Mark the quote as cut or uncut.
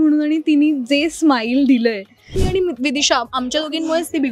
cut